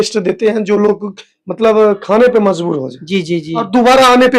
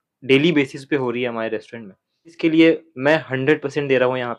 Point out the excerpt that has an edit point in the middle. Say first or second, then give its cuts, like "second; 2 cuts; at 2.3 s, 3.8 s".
second; 1 cut; at 2.4 s